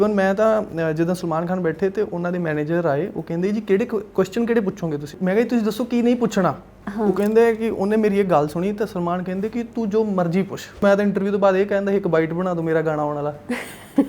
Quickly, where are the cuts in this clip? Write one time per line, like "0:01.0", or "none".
0:05.2
0:10.8